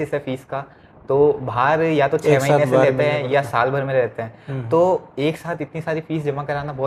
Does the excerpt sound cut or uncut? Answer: uncut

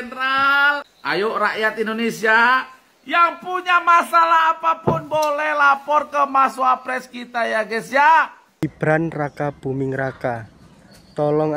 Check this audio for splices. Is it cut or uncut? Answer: cut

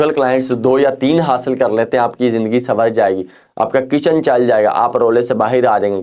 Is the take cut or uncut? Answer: uncut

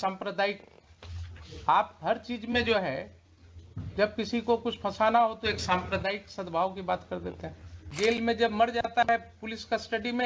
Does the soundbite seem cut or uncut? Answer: cut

